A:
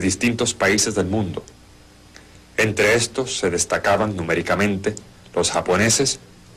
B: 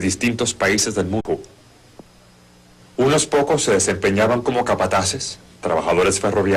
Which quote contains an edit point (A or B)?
A